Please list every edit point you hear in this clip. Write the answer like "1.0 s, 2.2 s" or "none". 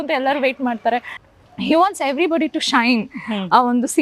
1.1 s